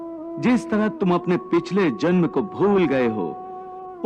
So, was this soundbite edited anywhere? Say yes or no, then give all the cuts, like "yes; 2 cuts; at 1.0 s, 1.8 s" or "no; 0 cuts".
no; 0 cuts